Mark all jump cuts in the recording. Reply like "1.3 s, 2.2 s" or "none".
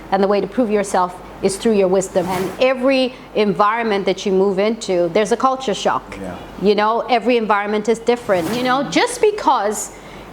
2.3 s, 8.6 s